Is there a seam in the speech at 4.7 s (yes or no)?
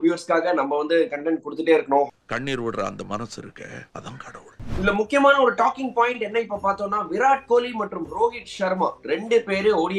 yes